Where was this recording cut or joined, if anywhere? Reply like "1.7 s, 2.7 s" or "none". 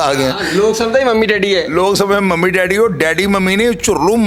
none